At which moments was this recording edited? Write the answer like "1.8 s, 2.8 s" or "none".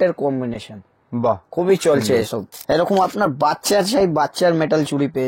2.5 s